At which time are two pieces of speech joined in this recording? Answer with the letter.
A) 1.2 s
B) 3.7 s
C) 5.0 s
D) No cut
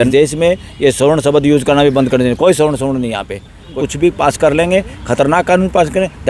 B